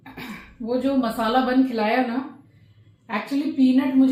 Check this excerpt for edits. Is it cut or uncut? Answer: uncut